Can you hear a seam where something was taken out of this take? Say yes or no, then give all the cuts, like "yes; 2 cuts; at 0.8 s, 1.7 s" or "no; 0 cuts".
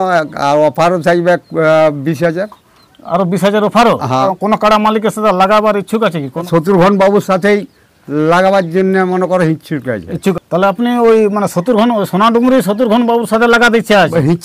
yes; 3 cuts; at 4.3 s, 6.5 s, 10.3 s